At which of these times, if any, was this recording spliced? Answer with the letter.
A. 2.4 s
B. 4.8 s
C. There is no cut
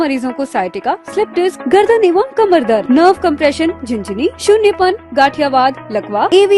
C